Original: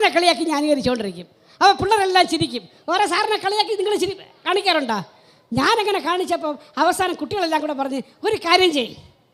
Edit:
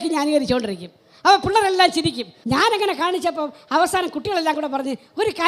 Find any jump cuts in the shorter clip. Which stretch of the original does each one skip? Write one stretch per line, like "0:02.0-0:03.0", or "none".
0:02.7-0:05.4